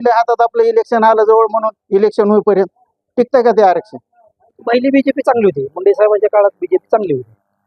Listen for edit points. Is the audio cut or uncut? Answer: cut